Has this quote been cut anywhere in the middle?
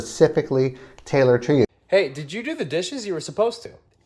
yes; 1 cut; at 1.7 s

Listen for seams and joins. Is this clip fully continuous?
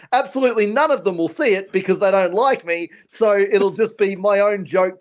yes; 0 cuts

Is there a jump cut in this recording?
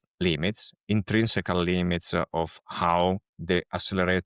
yes; 1 cut; at 3.3 s

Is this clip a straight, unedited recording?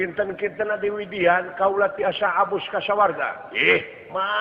yes; 0 cuts

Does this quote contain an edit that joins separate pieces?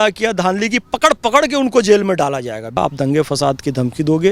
yes; 1 cut; at 2.8 s

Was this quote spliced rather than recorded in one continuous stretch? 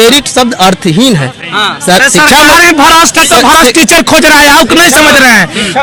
no; 0 cuts

